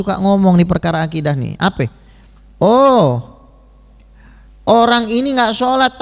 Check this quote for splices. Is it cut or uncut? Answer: uncut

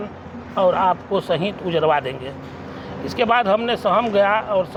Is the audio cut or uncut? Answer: uncut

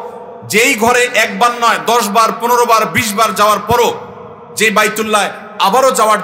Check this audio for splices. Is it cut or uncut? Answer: uncut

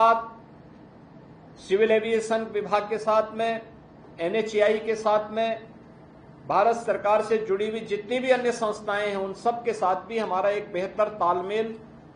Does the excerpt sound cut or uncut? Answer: uncut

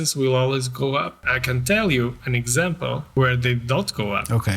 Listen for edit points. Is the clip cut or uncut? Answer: cut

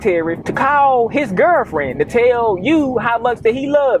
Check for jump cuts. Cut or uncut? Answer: uncut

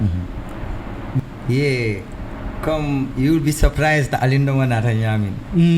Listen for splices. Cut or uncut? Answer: cut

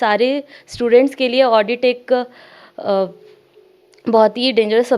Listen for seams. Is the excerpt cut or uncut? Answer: uncut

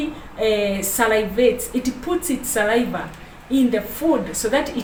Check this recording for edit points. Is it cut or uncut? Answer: uncut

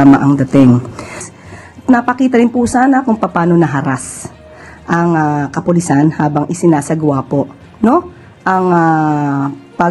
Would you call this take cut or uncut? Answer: cut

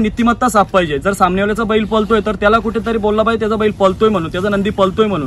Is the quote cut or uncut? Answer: uncut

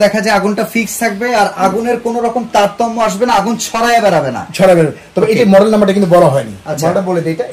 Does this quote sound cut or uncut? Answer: uncut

